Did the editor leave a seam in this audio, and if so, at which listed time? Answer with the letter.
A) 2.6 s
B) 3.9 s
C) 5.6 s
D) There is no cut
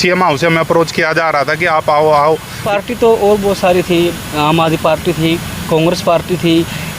A